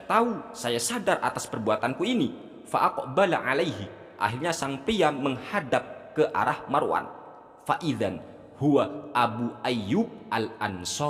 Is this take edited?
no; 0 cuts

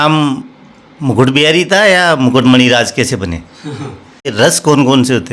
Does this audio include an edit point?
yes; 1 cut; at 4.3 s

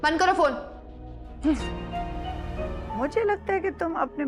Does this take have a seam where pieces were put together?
yes; 1 cut; at 2.8 s

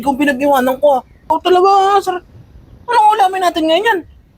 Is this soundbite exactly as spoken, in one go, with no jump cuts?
no; 1 cut; at 1.2 s

